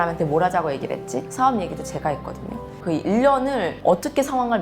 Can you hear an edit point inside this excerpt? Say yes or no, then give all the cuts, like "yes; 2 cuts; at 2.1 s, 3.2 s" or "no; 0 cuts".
yes; 1 cut; at 2.7 s